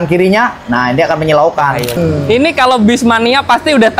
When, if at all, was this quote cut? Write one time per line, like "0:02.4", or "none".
0:02.0